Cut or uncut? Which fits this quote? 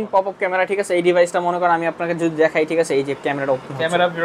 uncut